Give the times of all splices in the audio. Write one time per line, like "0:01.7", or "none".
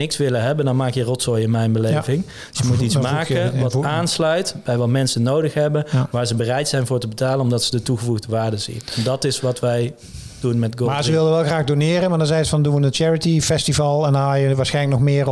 none